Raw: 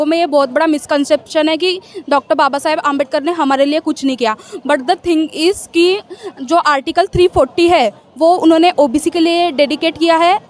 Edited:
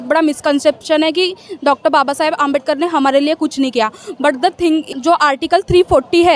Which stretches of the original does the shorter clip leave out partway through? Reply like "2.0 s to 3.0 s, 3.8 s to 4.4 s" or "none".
5.3 s to 6.3 s